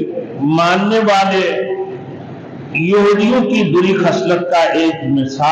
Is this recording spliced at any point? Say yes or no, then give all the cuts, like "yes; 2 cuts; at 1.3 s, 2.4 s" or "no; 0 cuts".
no; 0 cuts